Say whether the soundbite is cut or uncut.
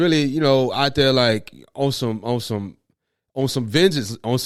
uncut